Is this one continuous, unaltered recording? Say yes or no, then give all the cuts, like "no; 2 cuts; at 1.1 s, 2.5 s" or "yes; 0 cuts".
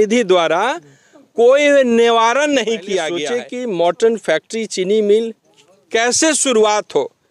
no; 1 cut; at 3.4 s